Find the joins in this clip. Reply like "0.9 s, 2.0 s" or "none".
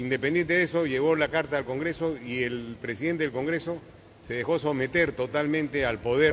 none